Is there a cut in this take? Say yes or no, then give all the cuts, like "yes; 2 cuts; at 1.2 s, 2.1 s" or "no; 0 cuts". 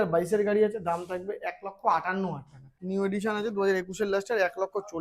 yes; 1 cut; at 2.8 s